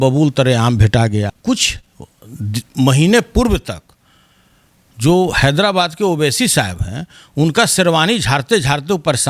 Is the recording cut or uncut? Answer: cut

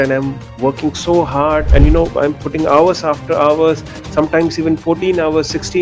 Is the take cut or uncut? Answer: cut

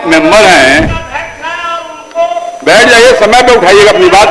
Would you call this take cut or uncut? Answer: cut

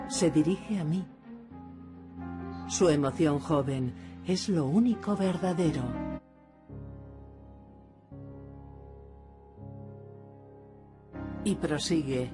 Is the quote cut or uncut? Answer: uncut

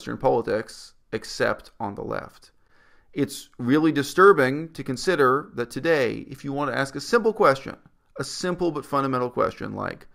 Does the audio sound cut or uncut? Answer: uncut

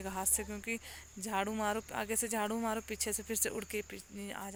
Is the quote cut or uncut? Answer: uncut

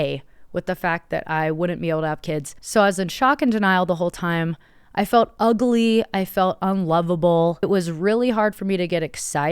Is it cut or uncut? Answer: cut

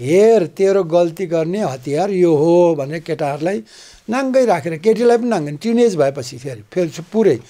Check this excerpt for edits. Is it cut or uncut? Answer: uncut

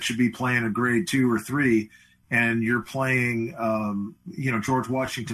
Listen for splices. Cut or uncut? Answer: uncut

